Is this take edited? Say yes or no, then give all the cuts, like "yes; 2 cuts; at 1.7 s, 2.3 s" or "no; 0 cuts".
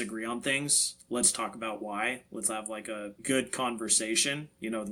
no; 0 cuts